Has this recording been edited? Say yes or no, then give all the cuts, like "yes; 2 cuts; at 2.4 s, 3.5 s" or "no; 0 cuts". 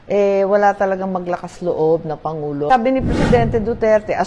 yes; 1 cut; at 2.7 s